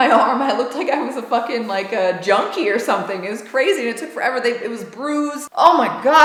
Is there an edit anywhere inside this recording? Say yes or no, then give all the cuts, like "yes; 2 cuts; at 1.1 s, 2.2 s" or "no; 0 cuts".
no; 0 cuts